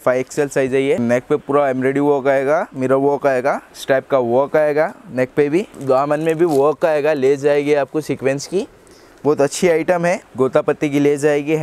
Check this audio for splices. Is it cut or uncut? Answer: cut